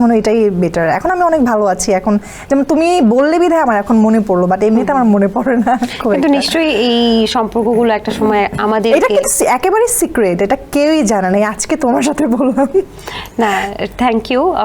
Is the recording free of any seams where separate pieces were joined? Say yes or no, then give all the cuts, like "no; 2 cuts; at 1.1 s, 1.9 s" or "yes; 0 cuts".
yes; 0 cuts